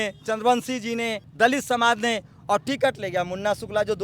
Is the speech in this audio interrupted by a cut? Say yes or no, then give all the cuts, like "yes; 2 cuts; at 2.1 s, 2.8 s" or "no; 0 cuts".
yes; 1 cut; at 1.2 s